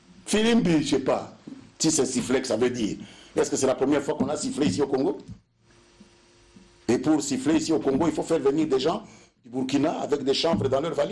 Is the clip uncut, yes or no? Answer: yes